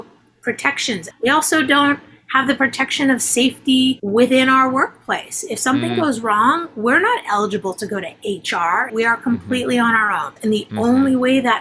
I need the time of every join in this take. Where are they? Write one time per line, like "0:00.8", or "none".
0:01.1
0:04.0
0:08.9
0:10.3